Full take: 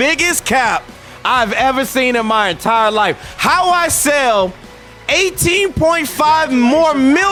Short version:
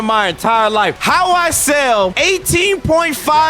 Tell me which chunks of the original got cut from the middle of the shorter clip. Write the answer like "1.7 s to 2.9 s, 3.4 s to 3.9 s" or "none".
3.2 s to 3.4 s, 4.5 s to 5.1 s